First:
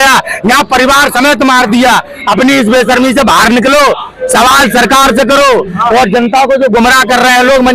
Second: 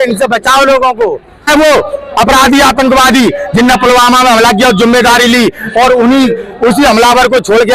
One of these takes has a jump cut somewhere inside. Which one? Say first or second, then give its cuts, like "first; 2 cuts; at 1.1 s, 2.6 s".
second; 1 cut; at 1.5 s